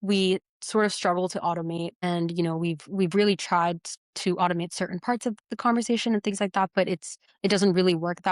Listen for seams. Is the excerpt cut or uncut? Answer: cut